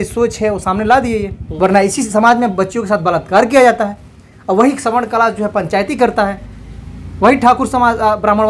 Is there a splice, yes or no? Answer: yes